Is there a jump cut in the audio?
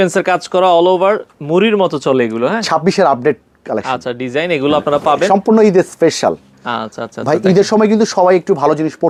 no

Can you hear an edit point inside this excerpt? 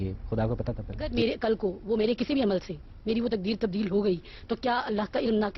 yes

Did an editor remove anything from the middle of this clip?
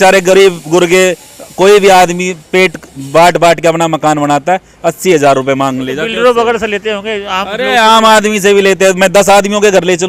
no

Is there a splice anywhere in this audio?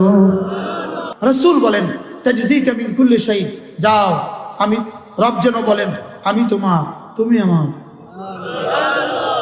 yes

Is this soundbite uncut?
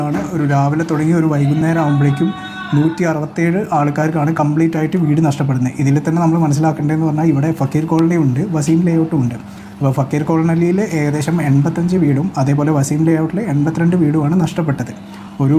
yes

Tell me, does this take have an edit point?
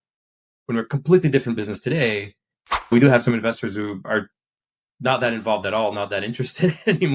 yes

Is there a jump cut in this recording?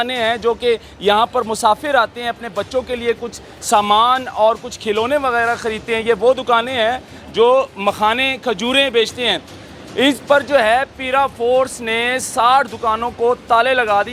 no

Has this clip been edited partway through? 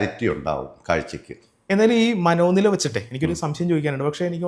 no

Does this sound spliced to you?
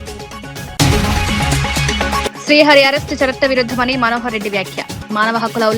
yes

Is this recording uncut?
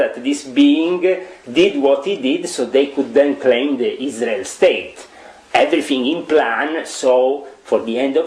yes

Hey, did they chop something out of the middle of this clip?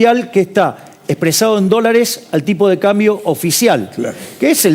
no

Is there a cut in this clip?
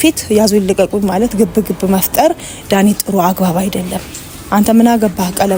no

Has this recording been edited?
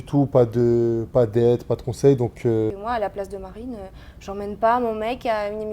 yes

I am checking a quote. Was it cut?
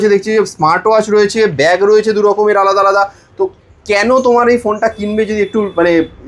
no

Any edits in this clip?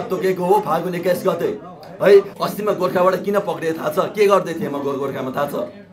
yes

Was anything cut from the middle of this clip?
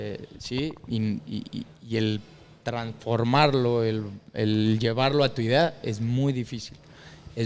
no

